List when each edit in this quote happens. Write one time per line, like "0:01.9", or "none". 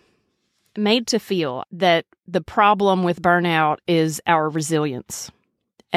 0:01.6